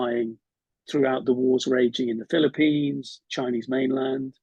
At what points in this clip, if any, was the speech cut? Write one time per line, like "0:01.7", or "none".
0:01.2